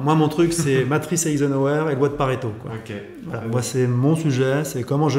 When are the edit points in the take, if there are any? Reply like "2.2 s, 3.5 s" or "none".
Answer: none